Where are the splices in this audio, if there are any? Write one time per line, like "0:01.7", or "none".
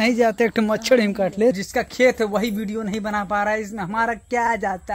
0:01.6